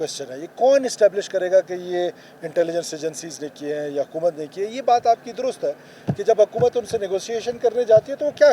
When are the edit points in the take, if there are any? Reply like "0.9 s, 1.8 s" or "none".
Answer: none